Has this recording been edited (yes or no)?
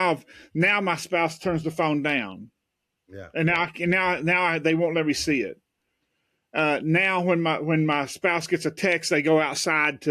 no